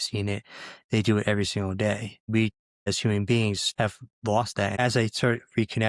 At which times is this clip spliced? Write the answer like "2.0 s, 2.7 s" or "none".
2.4 s, 3.6 s, 4.8 s